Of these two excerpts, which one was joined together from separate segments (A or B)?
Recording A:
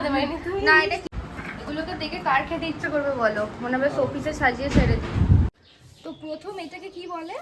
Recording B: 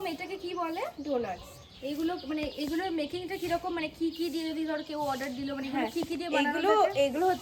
A